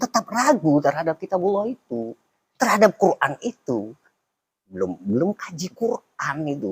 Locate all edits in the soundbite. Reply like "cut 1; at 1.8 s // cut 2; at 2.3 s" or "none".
cut 1; at 4.6 s